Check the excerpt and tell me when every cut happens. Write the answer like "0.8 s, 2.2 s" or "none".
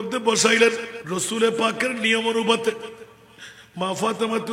0.9 s